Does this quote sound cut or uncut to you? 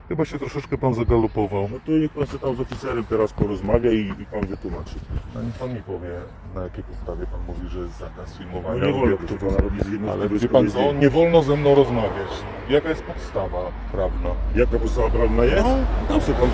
uncut